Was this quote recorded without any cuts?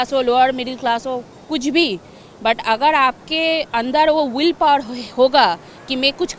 yes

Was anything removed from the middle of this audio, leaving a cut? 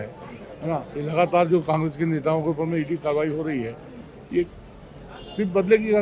no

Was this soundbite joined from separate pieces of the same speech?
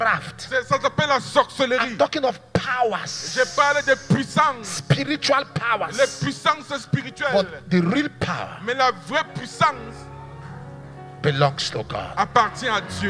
no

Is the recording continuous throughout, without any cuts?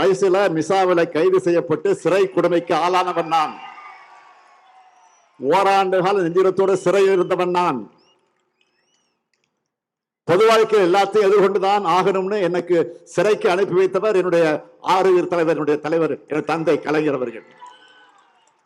yes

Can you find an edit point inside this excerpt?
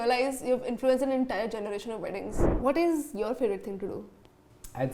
yes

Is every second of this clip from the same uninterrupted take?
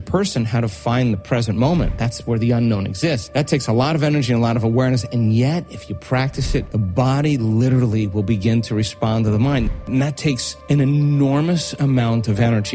no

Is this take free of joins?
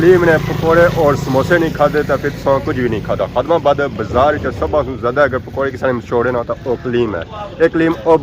yes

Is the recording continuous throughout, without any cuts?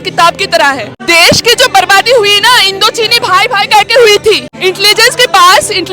no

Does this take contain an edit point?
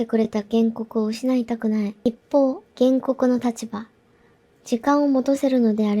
yes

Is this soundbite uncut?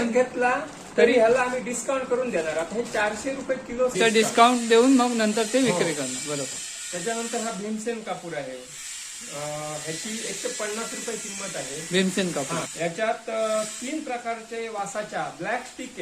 no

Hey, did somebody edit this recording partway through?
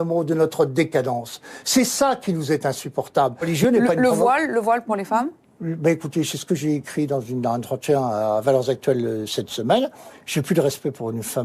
yes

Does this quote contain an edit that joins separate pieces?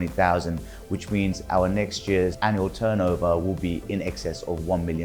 yes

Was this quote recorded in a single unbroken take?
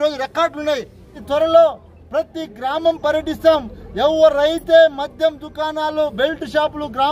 no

